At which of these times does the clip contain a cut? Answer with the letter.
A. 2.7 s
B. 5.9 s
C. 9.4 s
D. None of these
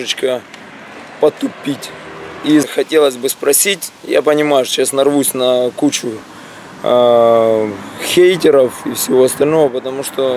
A